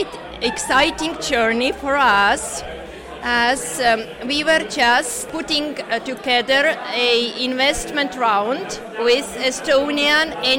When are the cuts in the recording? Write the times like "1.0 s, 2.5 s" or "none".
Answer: 5.3 s